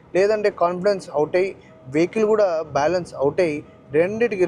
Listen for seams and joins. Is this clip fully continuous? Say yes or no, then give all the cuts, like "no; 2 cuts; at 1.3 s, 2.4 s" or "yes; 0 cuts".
yes; 0 cuts